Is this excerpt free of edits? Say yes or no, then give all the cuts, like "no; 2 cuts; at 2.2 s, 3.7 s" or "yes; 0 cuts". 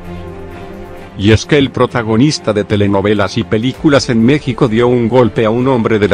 no; 1 cut; at 1.1 s